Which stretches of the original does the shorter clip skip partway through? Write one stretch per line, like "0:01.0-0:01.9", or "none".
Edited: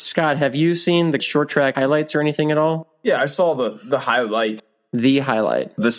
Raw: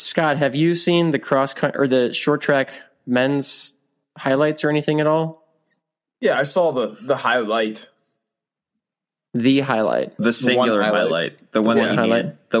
0:01.2-0:03.7
0:05.4-0:06.1
0:07.9-0:09.1